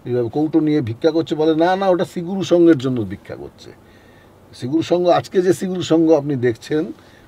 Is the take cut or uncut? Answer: uncut